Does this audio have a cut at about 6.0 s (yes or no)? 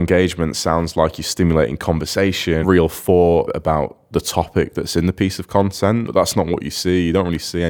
yes